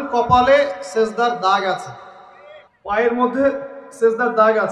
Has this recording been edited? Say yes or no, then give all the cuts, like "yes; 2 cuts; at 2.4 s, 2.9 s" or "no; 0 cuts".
no; 0 cuts